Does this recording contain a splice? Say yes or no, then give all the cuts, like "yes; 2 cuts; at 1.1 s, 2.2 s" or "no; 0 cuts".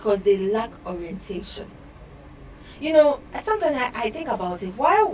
no; 0 cuts